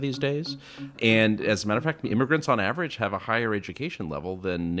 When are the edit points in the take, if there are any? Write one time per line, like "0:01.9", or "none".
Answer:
0:01.0